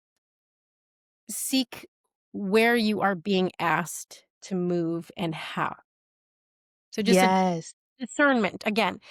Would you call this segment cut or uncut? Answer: uncut